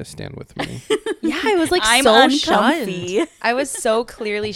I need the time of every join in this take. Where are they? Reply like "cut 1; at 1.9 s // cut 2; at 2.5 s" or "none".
none